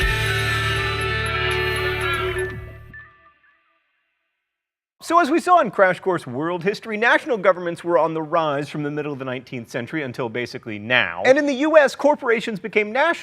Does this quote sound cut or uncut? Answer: cut